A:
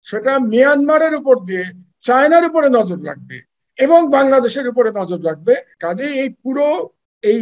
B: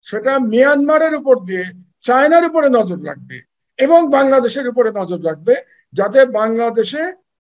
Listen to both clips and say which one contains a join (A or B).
A